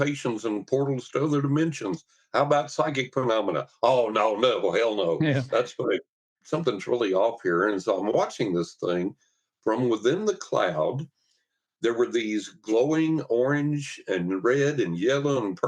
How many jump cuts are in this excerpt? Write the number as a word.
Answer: one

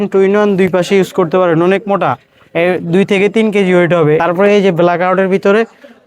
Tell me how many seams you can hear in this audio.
one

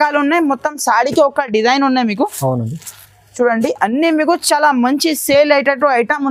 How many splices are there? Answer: zero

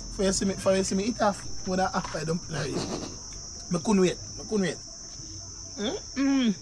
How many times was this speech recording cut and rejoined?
zero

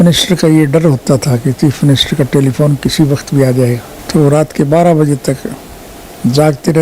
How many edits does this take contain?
one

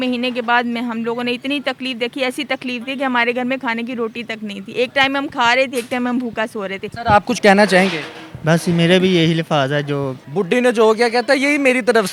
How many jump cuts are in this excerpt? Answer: two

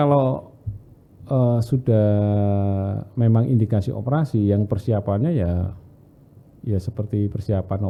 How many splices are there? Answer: zero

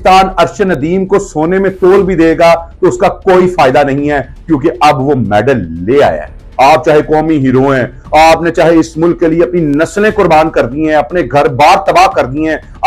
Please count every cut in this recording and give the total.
one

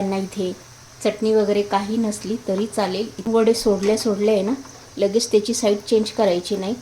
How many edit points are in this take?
two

